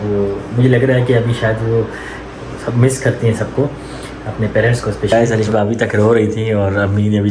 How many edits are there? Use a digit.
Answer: 1